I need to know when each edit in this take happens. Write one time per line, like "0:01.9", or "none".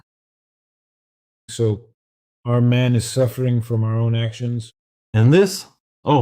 0:05.0

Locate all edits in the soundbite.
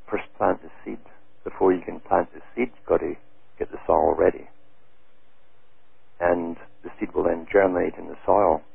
0:07.5

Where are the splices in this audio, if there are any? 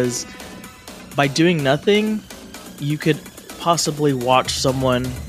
none

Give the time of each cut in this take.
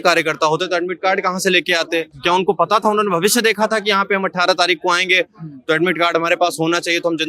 none

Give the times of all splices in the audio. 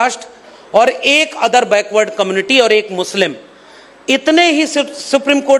none

